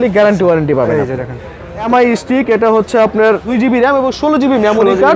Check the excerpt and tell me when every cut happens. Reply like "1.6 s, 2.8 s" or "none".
1.9 s, 3.5 s